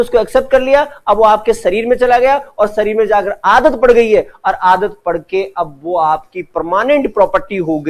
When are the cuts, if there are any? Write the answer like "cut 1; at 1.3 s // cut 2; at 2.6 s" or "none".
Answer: none